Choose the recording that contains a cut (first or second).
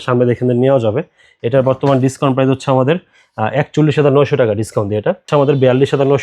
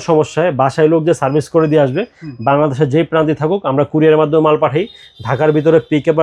first